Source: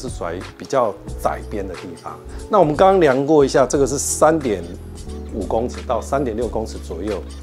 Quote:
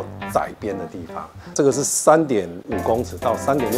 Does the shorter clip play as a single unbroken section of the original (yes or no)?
no